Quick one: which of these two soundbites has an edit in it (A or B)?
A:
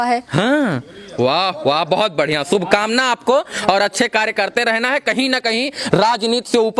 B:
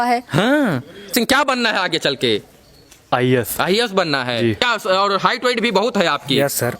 B